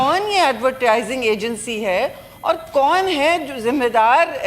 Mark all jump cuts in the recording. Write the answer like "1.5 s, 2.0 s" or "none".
none